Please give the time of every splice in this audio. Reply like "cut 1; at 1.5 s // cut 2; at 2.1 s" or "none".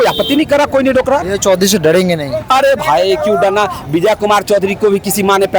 cut 1; at 1.3 s